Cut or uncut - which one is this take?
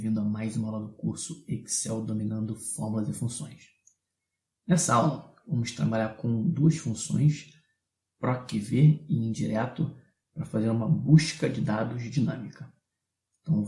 cut